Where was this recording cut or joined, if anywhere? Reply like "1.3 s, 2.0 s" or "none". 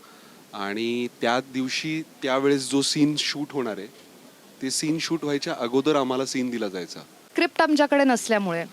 7.3 s